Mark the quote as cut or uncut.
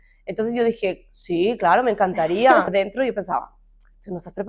cut